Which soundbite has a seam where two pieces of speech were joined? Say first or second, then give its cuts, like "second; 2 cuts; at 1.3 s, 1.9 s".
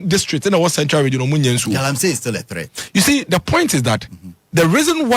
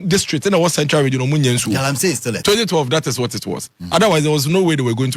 second; 1 cut; at 2.3 s